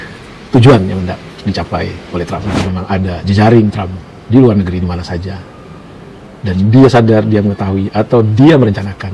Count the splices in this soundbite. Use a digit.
1